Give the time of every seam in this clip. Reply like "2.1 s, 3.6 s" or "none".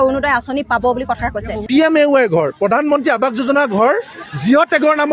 1.6 s